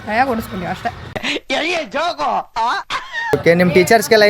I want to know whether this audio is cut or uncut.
cut